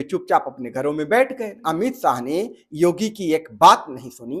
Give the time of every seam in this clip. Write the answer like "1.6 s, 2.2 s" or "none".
1.6 s